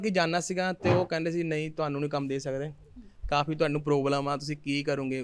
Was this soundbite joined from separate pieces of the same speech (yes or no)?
no